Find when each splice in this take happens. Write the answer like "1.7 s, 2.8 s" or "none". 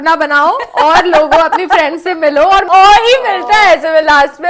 2.7 s